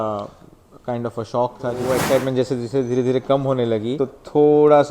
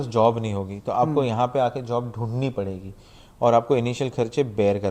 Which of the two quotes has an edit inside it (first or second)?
first